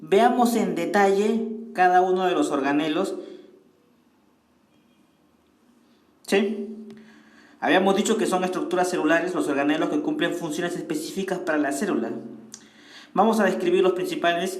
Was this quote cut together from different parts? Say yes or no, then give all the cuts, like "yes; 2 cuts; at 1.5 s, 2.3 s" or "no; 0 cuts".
yes; 1 cut; at 5.7 s